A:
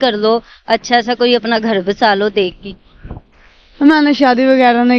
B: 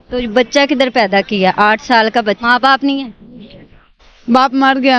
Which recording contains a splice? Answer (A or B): B